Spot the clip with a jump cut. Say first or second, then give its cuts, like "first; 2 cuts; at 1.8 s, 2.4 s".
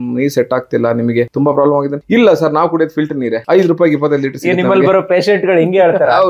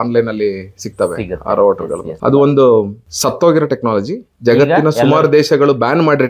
first; 2 cuts; at 1.8 s, 3.4 s